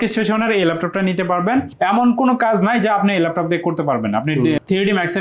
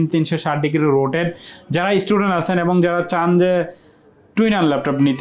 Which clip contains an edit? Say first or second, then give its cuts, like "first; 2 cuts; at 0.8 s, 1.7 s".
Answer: first; 1 cut; at 1.7 s